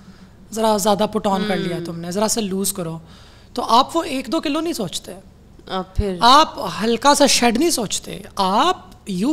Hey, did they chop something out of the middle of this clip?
no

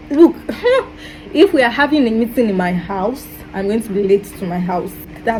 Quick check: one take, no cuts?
yes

